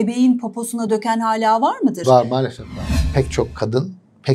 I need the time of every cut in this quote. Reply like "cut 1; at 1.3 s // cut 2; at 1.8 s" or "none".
cut 1; at 3.0 s